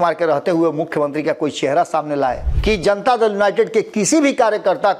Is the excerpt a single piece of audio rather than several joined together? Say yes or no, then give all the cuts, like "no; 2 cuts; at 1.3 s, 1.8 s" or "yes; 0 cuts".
no; 1 cut; at 2.5 s